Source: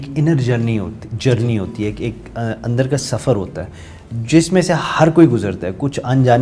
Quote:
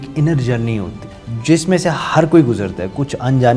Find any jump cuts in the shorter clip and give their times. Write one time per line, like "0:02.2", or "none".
0:01.0